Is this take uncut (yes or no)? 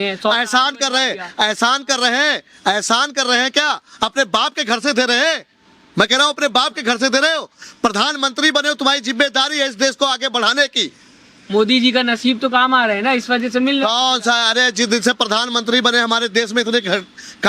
yes